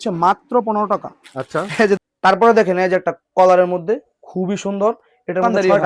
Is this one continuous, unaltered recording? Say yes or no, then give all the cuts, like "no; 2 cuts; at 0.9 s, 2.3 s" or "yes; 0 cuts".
no; 1 cut; at 2.0 s